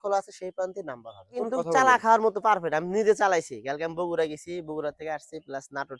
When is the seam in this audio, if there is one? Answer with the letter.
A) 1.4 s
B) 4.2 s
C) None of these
A